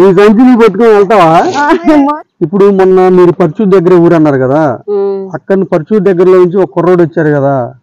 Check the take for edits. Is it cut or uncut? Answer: cut